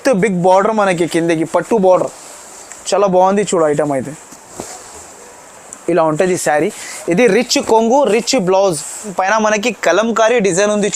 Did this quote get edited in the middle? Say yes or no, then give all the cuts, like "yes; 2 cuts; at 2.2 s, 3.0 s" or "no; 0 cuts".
yes; 1 cut; at 9.1 s